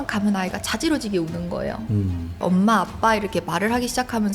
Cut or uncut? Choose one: cut